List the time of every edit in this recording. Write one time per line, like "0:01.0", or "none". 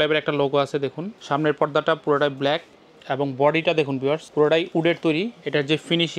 0:01.1
0:04.3